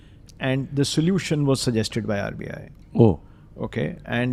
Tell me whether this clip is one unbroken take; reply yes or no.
yes